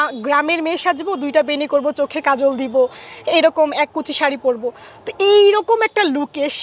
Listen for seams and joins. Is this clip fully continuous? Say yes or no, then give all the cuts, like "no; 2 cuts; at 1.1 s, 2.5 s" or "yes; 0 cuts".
yes; 0 cuts